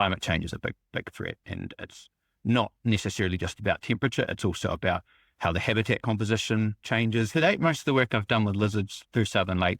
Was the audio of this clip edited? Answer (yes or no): yes